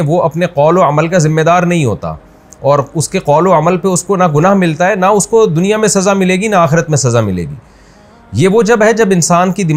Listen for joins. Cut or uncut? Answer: uncut